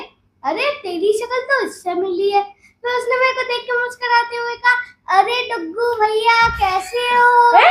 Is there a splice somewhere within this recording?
no; 0 cuts

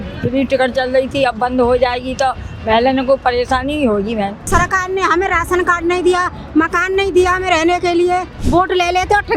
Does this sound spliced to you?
yes; 2 cuts; at 4.4 s, 8.4 s

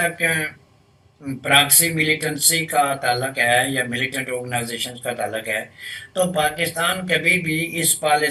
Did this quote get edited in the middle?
no; 0 cuts

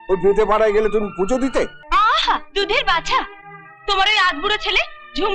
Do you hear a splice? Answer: yes; 1 cut; at 1.8 s

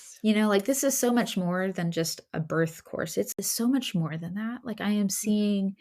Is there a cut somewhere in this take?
yes; 1 cut; at 3.4 s

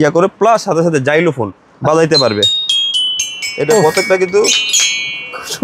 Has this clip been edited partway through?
no; 0 cuts

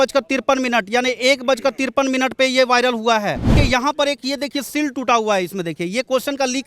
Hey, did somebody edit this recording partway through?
yes; 1 cut; at 3.5 s

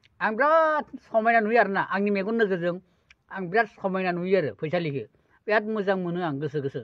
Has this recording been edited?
no; 0 cuts

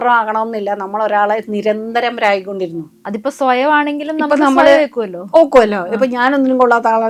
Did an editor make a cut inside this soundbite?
yes; 1 cut; at 2.9 s

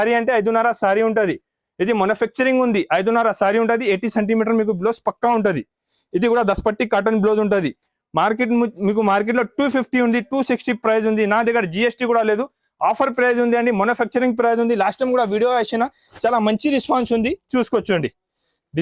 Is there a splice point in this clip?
no; 0 cuts

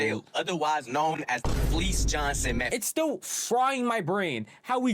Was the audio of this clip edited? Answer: yes; 1 cut; at 2.7 s

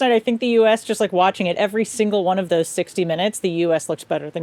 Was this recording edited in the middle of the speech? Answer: no; 0 cuts

